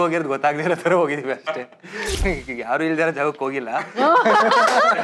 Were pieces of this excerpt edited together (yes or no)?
yes